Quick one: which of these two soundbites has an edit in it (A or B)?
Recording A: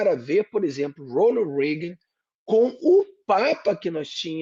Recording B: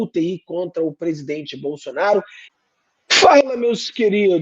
B